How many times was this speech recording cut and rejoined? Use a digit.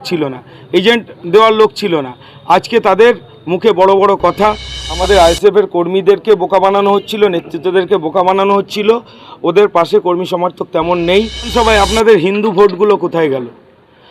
2